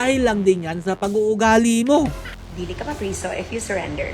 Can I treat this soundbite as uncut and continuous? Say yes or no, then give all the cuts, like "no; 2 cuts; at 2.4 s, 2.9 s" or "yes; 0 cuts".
no; 1 cut; at 2.3 s